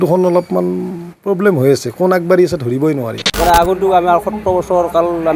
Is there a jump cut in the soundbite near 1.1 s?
no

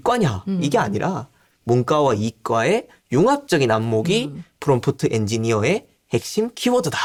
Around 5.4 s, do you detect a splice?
no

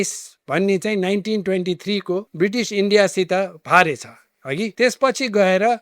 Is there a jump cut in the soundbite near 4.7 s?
yes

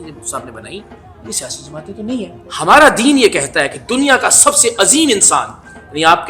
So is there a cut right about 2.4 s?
yes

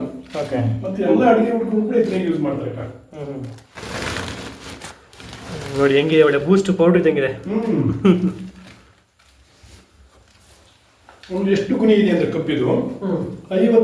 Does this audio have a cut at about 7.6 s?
no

